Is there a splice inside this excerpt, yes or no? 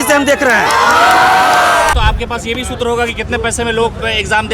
yes